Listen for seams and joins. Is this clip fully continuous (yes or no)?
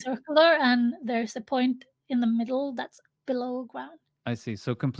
no